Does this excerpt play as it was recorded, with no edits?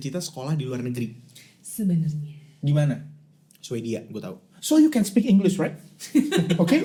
yes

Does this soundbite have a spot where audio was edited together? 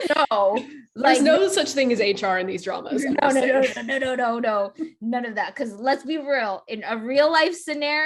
no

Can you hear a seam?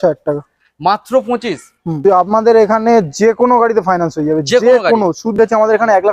yes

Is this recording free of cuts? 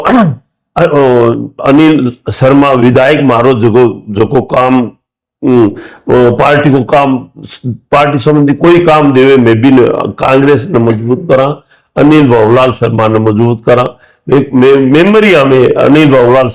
yes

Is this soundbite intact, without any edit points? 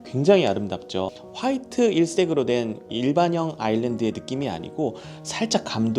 no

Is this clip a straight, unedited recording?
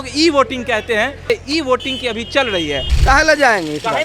no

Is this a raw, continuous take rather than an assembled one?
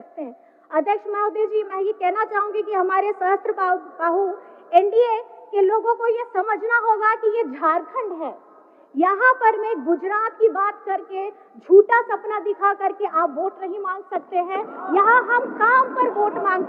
yes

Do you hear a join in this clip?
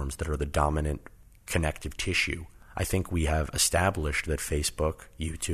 yes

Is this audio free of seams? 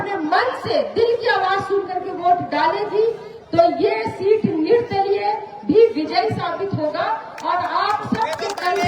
yes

